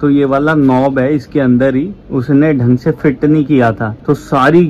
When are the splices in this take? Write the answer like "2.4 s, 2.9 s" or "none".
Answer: none